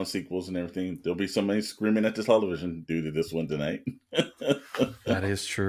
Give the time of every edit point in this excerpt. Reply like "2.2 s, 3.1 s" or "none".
none